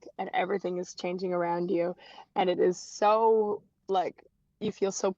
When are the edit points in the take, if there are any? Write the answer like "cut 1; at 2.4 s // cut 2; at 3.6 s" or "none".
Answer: none